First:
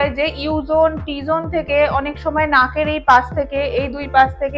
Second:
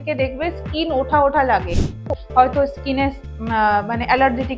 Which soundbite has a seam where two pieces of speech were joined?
second; 1 cut; at 2.1 s

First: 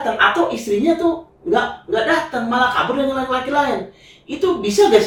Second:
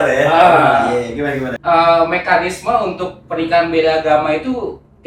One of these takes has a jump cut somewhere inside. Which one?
second; 1 cut; at 1.5 s

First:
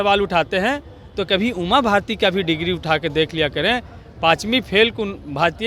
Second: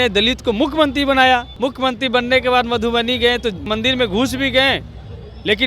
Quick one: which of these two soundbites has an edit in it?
second; 2 cuts; at 1.5 s, 3.7 s

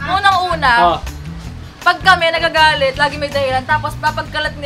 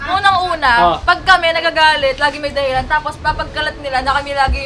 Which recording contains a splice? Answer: second; 1 cut; at 1.0 s

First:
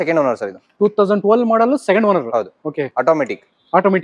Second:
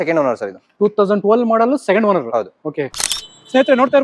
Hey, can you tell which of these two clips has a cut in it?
second; 1 cut; at 2.9 s

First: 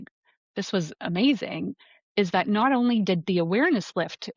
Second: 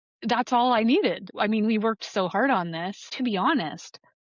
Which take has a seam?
second; 2 cuts; at 1.3 s, 3.1 s

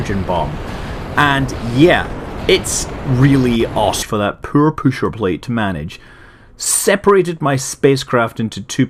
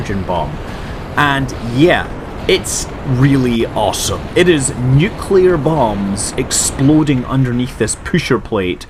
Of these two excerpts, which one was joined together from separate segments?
second; 1 cut; at 4.0 s

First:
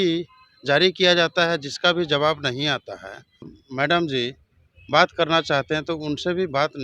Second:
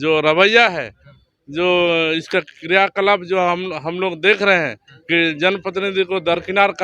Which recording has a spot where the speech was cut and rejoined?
first; 1 cut; at 3.5 s

